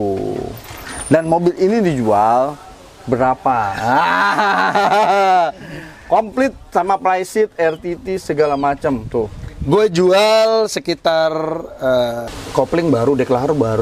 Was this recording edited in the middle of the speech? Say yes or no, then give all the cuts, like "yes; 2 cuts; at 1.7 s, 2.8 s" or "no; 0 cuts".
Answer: yes; 1 cut; at 12.3 s